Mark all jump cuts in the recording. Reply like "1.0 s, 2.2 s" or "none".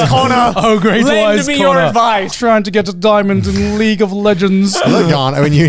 2.3 s